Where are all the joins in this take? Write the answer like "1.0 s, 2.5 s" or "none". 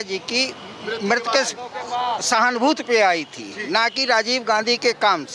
none

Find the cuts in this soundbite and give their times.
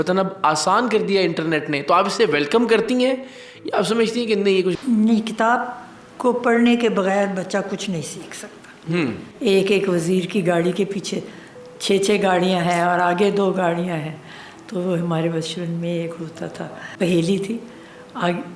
4.8 s, 9.3 s, 16.8 s

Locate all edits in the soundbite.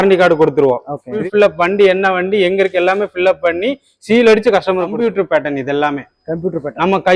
1.1 s, 5.0 s

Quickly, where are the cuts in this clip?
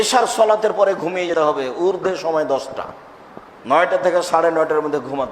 1.3 s

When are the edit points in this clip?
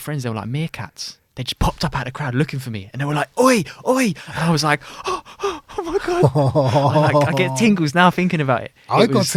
none

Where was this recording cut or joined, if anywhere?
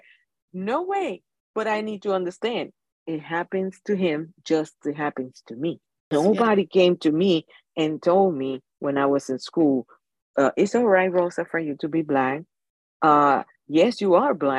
6.0 s

